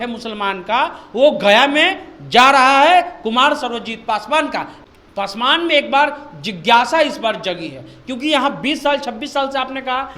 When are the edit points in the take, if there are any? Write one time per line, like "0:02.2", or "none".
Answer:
0:04.7